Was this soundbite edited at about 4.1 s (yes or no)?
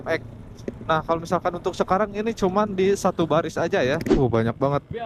yes